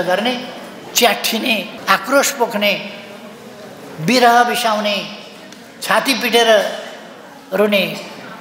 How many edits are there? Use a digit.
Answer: 1